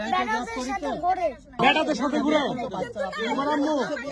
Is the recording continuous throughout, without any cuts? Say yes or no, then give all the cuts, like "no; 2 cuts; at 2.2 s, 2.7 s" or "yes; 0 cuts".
no; 1 cut; at 1.5 s